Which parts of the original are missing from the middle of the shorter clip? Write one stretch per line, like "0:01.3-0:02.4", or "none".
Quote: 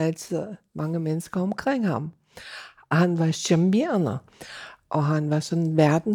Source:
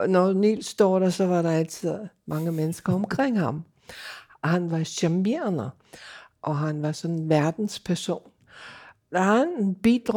none